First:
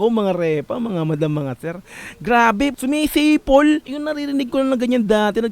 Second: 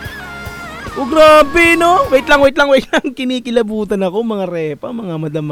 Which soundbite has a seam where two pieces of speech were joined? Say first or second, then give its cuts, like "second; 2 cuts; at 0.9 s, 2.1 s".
first; 2 cuts; at 2.8 s, 4.0 s